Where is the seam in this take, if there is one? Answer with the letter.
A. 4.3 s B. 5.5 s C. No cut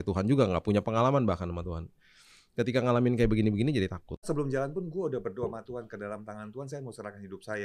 A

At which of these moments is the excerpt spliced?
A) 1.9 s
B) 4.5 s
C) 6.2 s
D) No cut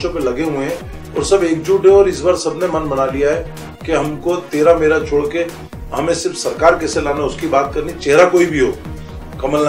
D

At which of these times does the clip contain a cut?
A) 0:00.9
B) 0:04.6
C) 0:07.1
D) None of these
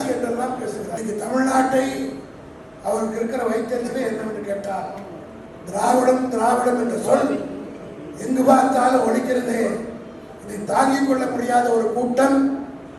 A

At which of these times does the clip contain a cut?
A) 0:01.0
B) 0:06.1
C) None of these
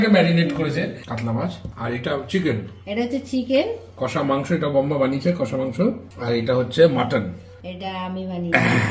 A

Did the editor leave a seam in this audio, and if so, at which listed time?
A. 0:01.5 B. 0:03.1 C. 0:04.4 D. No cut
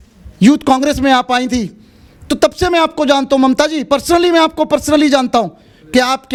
D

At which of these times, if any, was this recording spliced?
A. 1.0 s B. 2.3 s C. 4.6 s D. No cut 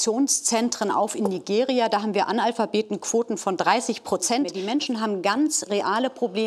C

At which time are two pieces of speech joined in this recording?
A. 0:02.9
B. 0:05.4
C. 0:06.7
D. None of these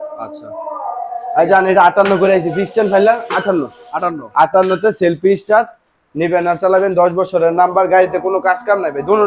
D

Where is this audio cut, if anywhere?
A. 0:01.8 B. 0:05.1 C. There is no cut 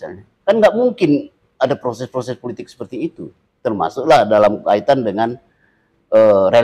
C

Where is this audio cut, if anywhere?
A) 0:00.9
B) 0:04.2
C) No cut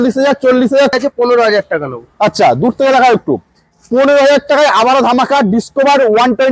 A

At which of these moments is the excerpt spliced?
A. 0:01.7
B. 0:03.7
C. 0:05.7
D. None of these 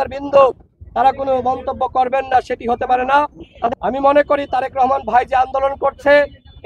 B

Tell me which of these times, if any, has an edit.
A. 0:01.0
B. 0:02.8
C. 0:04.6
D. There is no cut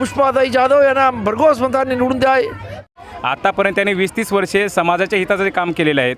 B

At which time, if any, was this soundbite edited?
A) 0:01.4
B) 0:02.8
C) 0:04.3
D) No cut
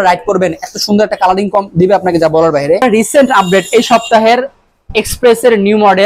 B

